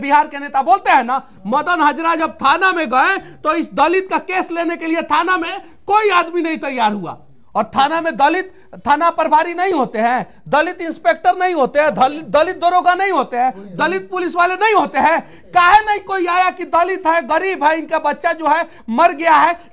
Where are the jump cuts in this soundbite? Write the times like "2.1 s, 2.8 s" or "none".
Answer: none